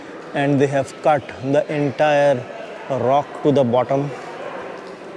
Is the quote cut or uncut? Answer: uncut